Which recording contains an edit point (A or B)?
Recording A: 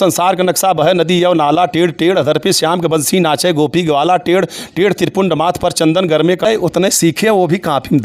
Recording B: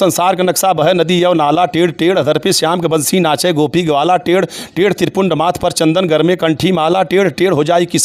A